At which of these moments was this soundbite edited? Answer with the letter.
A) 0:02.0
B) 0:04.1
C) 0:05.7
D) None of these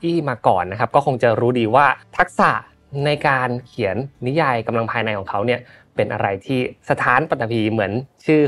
A